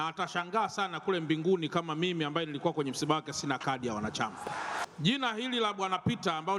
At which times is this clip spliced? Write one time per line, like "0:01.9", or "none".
0:04.8

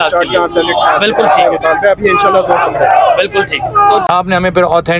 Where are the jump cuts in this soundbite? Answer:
0:04.1

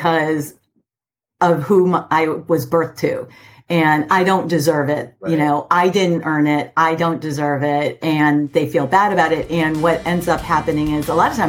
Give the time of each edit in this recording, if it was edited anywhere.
none

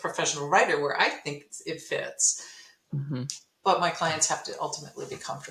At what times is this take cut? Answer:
none

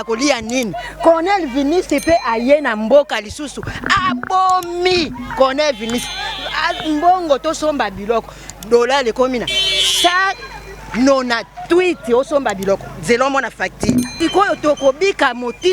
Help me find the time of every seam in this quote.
0:14.1

